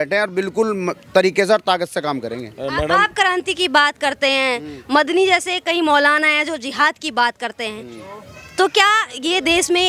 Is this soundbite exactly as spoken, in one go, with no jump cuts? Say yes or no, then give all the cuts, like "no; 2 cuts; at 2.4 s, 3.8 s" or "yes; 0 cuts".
yes; 0 cuts